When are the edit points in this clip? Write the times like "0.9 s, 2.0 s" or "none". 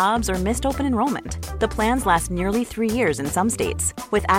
none